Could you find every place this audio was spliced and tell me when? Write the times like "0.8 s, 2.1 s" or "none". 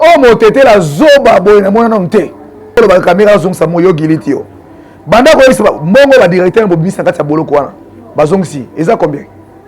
2.8 s